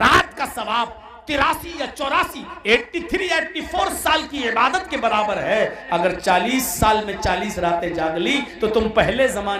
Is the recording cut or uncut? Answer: cut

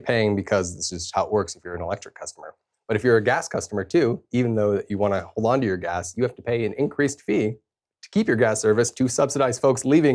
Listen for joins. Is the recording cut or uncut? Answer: uncut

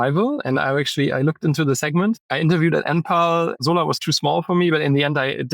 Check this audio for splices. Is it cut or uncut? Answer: cut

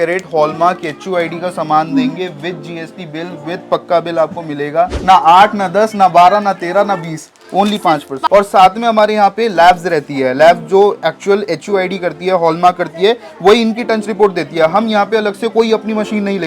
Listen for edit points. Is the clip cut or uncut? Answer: cut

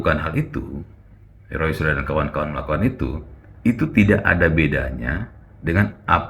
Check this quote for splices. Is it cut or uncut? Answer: uncut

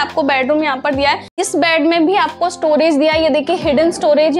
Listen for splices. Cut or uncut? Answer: cut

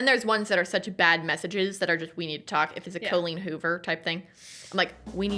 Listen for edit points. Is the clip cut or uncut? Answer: uncut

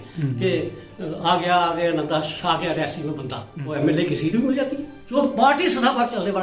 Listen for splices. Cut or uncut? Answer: cut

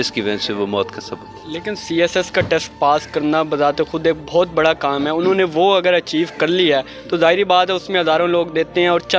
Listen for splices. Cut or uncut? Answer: uncut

